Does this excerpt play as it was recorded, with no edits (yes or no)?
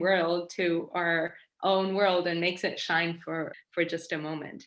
no